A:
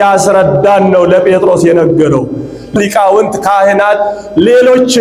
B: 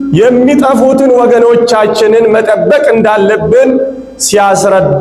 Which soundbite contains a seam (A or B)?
A